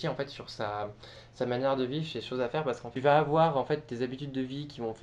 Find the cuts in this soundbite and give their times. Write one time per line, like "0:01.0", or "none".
0:02.8